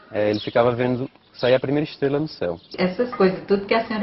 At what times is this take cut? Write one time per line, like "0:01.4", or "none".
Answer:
0:02.7